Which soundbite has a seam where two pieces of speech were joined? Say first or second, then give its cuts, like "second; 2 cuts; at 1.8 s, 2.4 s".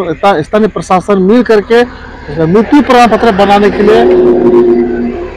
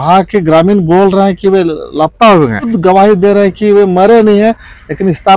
second; 1 cut; at 2.7 s